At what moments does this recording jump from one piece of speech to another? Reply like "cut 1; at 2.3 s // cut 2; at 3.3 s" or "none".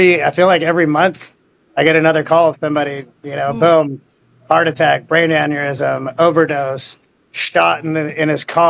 none